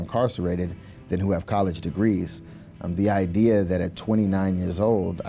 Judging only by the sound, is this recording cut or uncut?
uncut